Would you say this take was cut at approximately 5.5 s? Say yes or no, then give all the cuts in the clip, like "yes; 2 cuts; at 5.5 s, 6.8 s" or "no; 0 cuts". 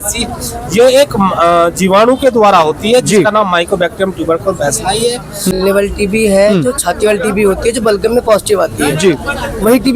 yes; 1 cut; at 5.5 s